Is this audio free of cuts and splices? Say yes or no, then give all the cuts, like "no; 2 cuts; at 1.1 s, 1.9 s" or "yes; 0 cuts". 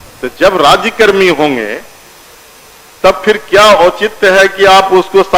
yes; 0 cuts